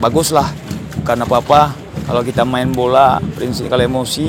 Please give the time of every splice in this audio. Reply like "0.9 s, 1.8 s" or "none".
none